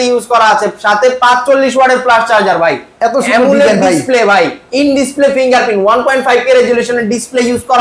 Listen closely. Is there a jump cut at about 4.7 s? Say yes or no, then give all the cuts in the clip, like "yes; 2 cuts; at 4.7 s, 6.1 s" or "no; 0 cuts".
no; 0 cuts